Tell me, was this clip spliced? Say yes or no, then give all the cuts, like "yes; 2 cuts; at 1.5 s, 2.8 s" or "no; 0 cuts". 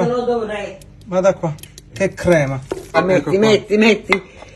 yes; 1 cut; at 3.0 s